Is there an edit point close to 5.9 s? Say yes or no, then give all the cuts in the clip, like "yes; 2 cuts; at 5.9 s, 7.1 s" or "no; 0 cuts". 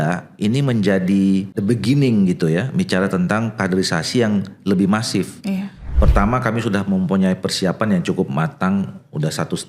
yes; 2 cuts; at 1.5 s, 5.9 s